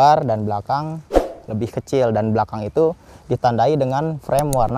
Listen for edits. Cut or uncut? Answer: uncut